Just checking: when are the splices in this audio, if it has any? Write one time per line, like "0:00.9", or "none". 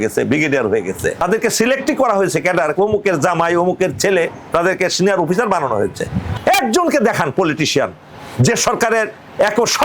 0:01.2
0:06.3

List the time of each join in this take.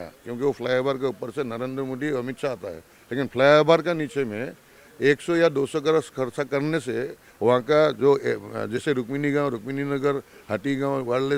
none

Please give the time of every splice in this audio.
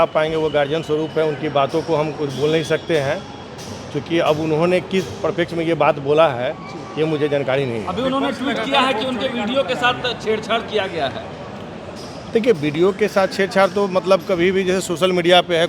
none

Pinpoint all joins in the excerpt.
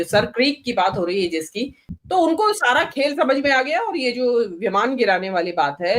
0:01.8

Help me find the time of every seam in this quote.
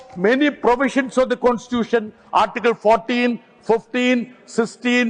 none

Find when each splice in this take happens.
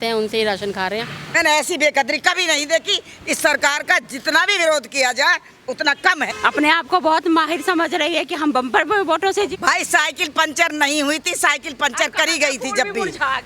0:01.2
0:06.2
0:09.5

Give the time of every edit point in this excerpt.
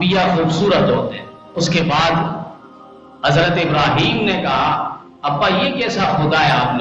0:01.4

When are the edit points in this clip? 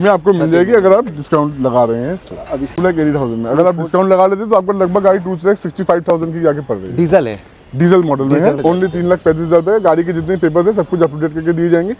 0:02.7
0:08.6

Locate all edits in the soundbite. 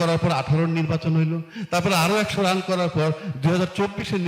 none

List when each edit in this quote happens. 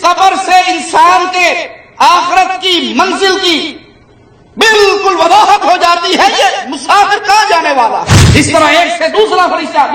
0:08.2

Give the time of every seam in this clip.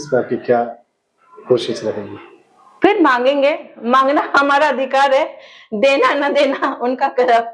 none

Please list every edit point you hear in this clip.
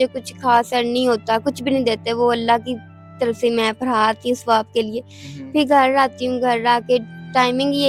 none

